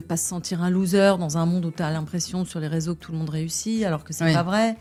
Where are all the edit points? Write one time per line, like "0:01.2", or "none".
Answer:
none